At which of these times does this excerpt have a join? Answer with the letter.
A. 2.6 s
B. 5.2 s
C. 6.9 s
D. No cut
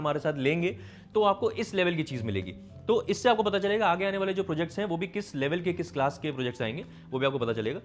D